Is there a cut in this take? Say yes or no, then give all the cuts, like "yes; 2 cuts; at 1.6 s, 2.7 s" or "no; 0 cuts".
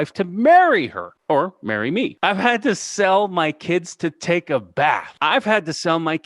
yes; 3 cuts; at 1.1 s, 2.1 s, 5.1 s